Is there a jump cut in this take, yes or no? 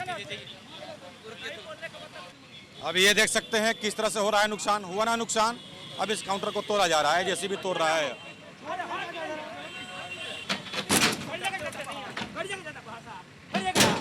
yes